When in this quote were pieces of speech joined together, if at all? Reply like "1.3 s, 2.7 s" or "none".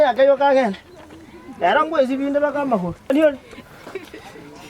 3.1 s